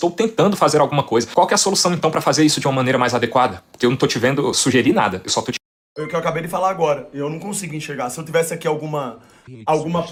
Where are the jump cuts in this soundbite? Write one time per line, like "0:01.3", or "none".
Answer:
none